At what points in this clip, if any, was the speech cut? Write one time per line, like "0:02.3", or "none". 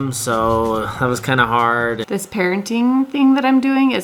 0:02.0